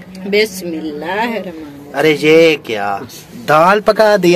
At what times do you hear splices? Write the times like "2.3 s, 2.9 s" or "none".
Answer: none